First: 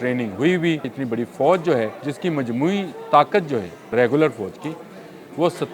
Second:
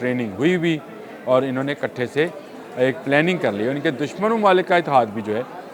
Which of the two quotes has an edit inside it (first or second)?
first